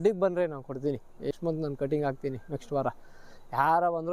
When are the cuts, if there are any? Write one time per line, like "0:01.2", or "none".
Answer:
0:01.3